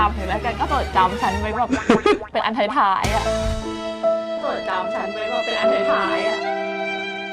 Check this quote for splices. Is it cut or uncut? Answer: uncut